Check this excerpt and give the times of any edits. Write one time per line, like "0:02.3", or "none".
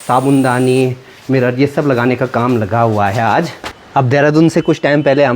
0:03.6